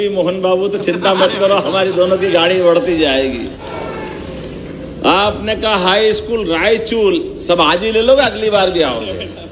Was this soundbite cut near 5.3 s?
no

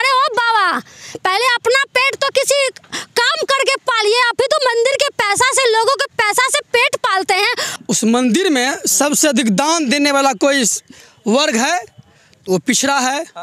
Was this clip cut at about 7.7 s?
yes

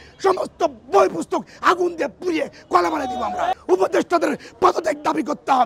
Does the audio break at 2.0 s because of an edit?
no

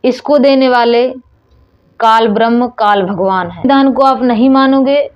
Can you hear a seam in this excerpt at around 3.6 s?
yes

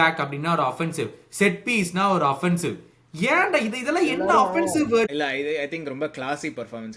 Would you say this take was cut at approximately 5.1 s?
yes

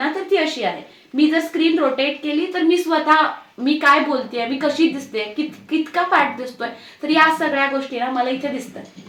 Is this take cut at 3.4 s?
no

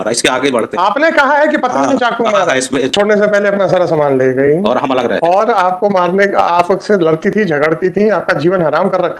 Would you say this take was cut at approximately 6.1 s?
no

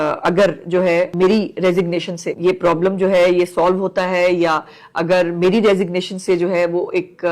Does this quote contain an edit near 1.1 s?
yes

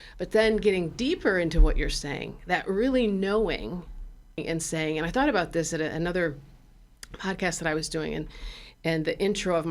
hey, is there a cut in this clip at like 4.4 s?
yes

